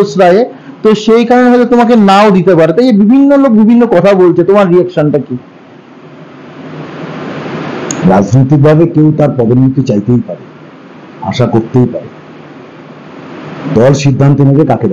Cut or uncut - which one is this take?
uncut